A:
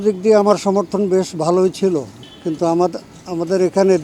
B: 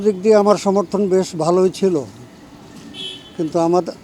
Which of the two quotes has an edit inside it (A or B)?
A